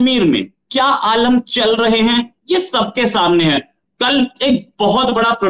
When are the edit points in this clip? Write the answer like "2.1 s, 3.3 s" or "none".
none